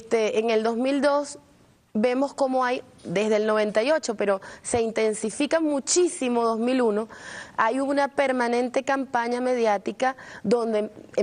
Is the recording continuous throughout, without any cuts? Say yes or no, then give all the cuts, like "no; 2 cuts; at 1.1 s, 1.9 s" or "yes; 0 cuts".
no; 1 cut; at 9.3 s